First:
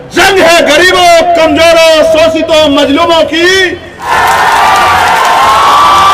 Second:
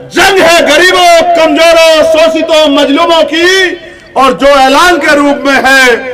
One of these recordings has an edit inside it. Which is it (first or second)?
first